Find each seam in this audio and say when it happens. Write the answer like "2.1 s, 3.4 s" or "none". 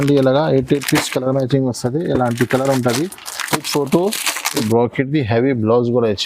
4.6 s